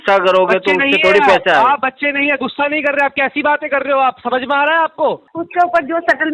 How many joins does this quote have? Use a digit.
1